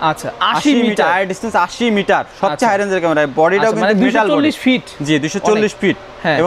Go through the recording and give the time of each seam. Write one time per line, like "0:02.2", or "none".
none

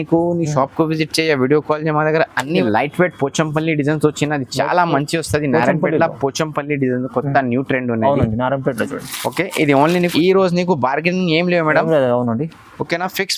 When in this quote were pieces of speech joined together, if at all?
0:02.6
0:10.0

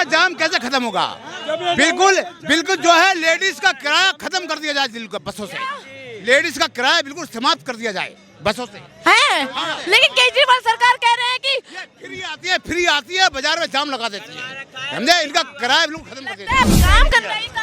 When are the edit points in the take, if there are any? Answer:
0:16.6

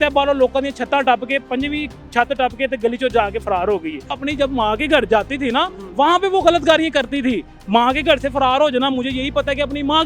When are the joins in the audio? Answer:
0:04.2

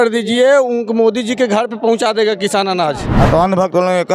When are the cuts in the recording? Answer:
0:03.1

